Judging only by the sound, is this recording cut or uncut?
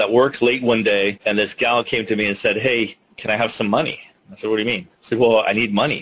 cut